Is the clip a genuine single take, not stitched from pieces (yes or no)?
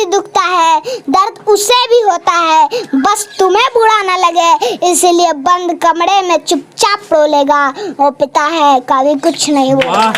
yes